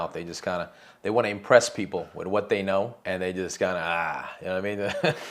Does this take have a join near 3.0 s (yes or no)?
yes